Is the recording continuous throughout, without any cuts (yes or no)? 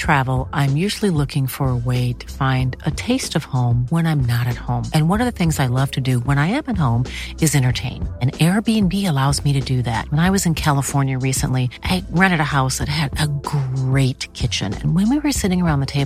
yes